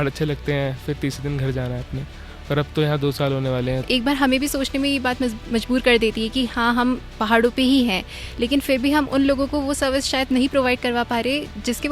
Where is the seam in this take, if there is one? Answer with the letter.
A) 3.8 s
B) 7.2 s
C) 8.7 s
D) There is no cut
A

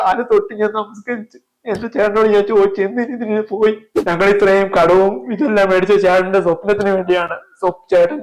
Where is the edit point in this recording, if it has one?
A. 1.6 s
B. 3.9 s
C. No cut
B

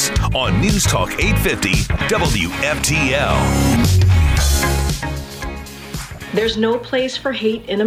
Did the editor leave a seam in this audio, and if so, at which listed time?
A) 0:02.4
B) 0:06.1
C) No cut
B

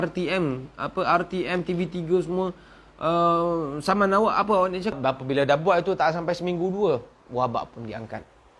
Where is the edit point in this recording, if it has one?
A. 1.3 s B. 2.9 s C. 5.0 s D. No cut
C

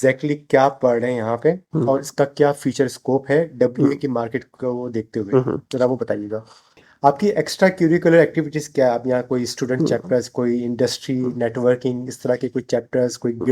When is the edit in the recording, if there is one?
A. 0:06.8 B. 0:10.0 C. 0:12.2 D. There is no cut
A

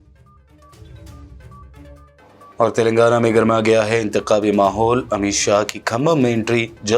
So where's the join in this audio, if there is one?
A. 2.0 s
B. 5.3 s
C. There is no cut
A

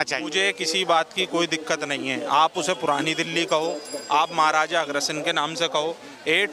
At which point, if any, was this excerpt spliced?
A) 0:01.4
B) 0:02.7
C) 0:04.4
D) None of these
D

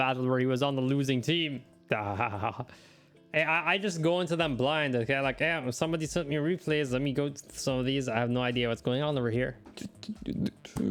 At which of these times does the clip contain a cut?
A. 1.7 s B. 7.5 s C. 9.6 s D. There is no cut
A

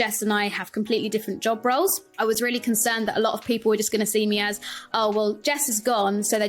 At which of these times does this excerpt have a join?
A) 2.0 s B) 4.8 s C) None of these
A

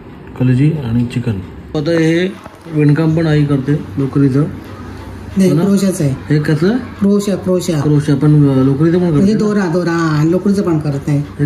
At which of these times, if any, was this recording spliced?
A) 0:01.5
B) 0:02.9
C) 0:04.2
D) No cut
A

